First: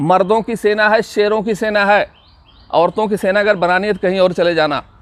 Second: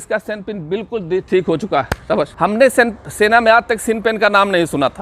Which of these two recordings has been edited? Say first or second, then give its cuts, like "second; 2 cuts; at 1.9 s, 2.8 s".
second; 1 cut; at 2.3 s